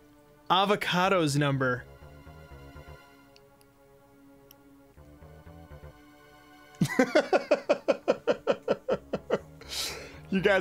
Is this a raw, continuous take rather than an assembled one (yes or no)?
yes